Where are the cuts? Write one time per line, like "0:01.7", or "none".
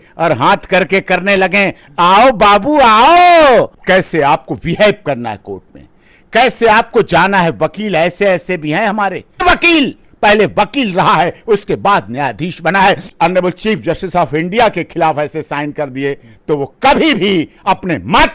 0:03.8
0:09.4
0:13.1